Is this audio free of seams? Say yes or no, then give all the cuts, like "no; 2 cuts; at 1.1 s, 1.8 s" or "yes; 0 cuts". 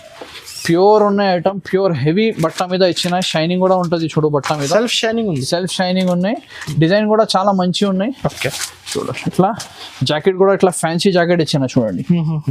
yes; 0 cuts